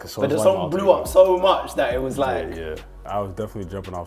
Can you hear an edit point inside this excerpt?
yes; 1 cut; at 3.0 s

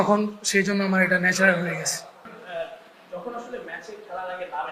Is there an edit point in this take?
yes; 1 cut; at 2.4 s

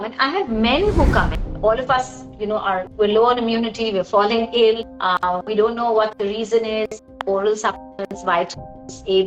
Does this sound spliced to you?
yes; 4 cuts; at 1.3 s, 2.9 s, 4.9 s, 7.1 s

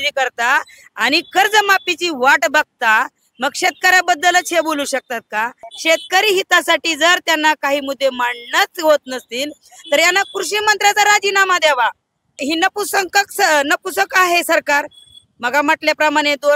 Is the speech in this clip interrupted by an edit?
yes; 2 cuts; at 5.7 s, 12.4 s

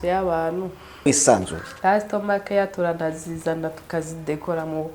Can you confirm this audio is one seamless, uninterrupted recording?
no; 1 cut; at 1.1 s

